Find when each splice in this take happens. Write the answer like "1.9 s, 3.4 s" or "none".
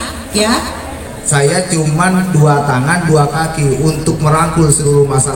1.1 s